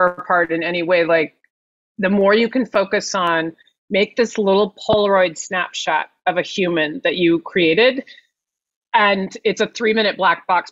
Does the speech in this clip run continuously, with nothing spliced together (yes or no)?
yes